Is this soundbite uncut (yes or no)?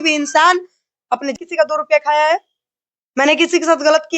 no